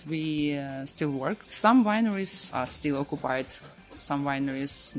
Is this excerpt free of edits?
no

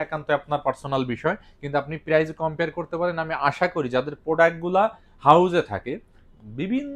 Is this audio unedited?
yes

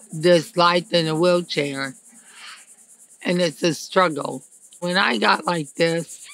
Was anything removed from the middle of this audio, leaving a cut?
yes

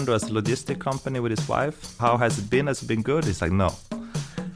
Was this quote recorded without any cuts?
no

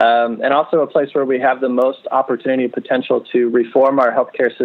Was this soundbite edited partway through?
no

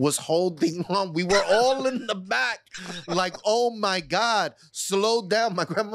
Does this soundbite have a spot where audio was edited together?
no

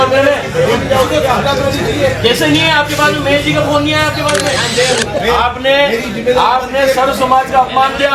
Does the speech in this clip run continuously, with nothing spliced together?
no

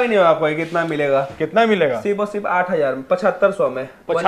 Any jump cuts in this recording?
no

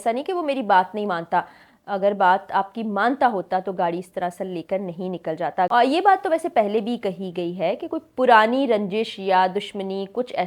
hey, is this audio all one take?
no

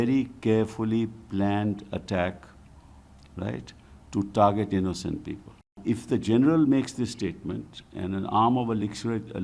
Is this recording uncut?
no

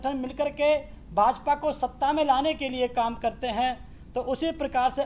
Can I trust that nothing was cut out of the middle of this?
yes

